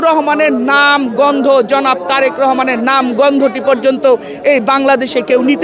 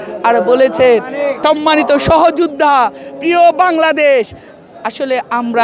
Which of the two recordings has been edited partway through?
second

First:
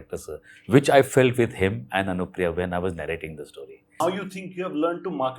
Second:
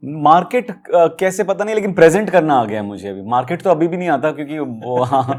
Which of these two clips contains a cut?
first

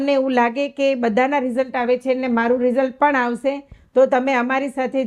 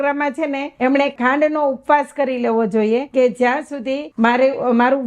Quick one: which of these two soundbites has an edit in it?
second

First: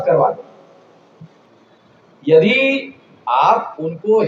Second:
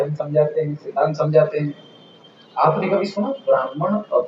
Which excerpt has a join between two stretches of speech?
first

